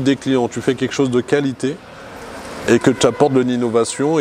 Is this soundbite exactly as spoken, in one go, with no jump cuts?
yes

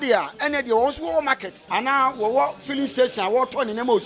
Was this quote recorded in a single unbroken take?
no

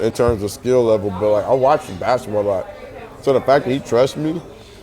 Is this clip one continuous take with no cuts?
yes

